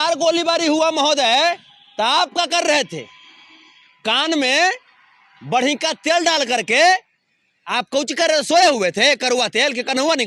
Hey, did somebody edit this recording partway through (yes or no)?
no